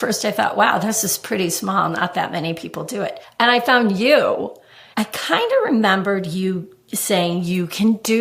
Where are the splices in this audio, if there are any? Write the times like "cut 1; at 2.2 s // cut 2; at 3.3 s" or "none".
cut 1; at 3.2 s // cut 2; at 4.9 s